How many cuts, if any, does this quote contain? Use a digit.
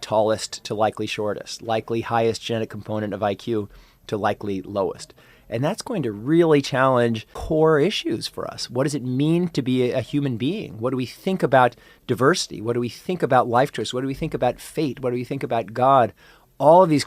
1